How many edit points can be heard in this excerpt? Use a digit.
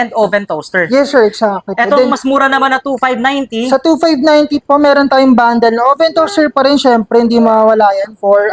0